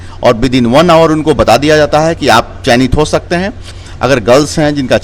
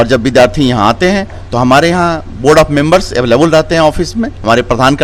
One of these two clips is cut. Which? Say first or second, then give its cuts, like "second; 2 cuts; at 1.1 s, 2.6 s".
first; 1 cut; at 3.7 s